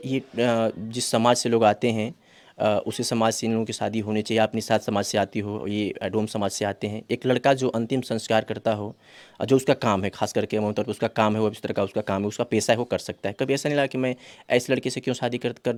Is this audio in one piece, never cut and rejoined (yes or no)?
yes